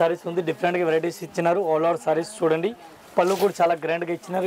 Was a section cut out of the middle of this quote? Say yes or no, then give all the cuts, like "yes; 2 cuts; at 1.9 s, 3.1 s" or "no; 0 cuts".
no; 0 cuts